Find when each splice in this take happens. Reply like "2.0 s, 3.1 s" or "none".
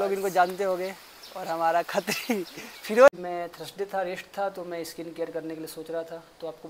3.1 s